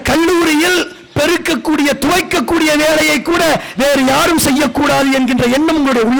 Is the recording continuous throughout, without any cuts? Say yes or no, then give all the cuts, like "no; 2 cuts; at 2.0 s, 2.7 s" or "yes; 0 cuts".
yes; 0 cuts